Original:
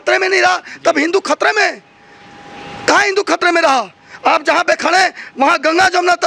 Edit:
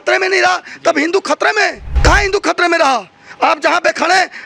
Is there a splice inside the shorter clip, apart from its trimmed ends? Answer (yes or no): yes